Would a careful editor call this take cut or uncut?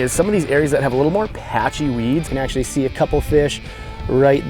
cut